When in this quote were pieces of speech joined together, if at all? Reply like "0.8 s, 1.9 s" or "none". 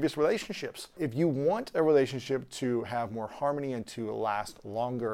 1.0 s